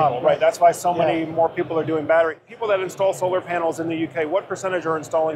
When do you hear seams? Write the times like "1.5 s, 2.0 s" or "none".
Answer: 2.5 s